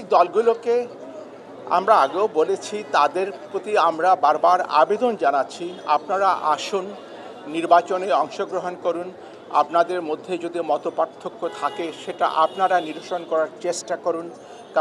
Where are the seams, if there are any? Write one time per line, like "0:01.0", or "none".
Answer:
none

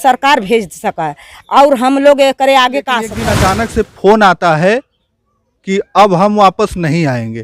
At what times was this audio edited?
0:03.2

